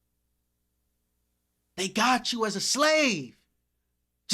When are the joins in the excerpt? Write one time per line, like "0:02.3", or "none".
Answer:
none